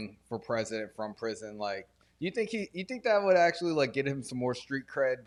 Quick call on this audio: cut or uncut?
uncut